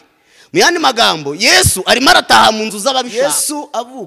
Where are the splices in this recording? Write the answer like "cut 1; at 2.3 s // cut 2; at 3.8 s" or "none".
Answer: cut 1; at 3.1 s

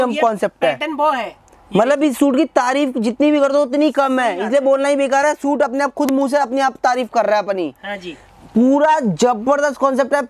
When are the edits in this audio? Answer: none

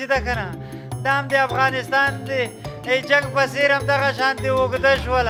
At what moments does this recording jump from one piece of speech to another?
none

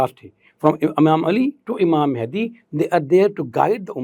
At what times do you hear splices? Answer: none

